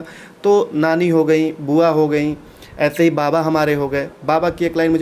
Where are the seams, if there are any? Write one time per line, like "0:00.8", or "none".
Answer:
none

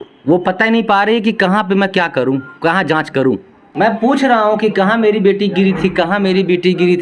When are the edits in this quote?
0:03.7

